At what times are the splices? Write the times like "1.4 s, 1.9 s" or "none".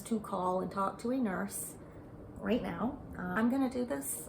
3.3 s